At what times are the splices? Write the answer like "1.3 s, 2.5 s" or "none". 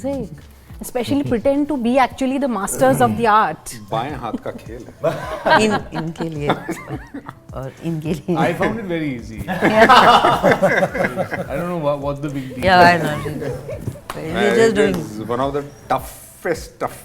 none